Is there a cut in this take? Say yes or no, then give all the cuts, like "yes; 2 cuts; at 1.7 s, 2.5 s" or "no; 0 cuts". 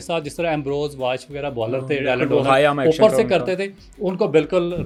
no; 0 cuts